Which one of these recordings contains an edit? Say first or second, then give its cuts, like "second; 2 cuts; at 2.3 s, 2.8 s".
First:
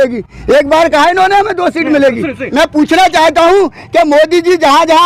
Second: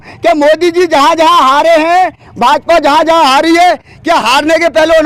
first; 1 cut; at 2.4 s